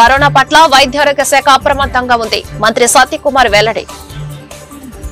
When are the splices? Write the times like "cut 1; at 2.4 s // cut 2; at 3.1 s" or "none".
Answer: cut 1; at 3.9 s